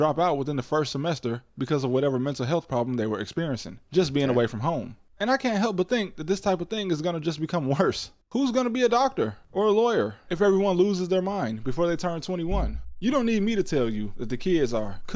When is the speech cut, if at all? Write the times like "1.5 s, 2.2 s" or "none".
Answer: none